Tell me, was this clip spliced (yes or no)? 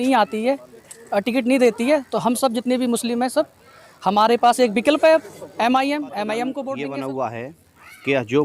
yes